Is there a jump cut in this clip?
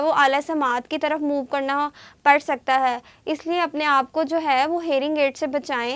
no; 0 cuts

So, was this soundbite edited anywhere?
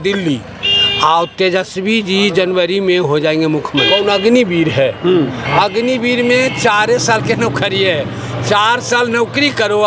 yes; 1 cut; at 3.9 s

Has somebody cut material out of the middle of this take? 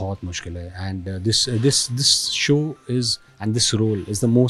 no; 0 cuts

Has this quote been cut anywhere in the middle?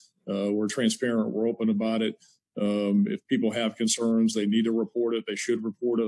no; 0 cuts

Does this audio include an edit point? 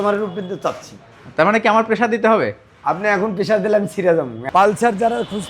yes; 1 cut; at 4.4 s

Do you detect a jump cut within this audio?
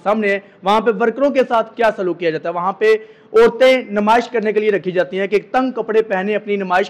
no; 0 cuts

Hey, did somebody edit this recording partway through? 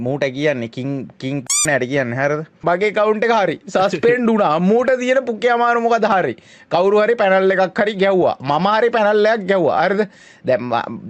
yes; 1 cut; at 2.5 s

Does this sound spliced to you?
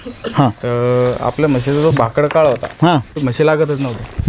yes; 1 cut; at 3.2 s

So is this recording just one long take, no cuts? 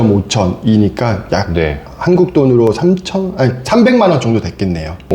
yes; 0 cuts

